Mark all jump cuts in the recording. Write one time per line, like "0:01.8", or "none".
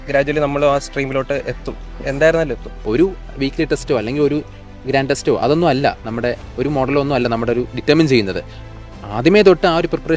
0:02.8